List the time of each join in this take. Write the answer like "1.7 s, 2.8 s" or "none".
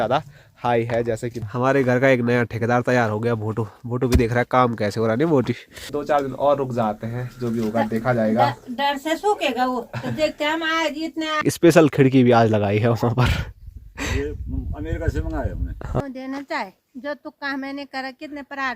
1.4 s, 5.9 s, 11.4 s, 16.0 s